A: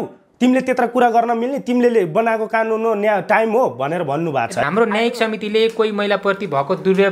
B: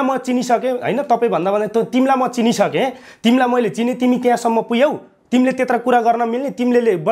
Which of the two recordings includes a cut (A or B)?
A